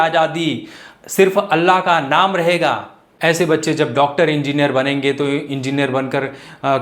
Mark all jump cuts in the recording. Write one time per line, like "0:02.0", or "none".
0:03.0